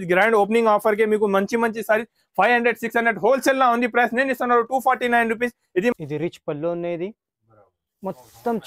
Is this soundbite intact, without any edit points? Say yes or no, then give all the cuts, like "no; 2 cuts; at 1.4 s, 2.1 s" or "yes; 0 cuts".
no; 1 cut; at 5.9 s